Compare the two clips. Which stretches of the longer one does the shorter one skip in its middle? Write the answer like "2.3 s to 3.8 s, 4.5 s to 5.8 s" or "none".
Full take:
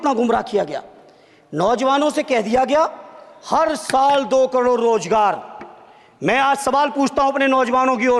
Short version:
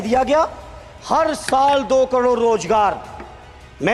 none